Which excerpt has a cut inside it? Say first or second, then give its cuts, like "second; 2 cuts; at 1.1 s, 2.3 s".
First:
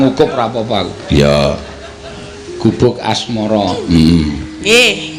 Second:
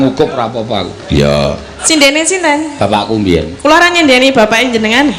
second; 1 cut; at 1.7 s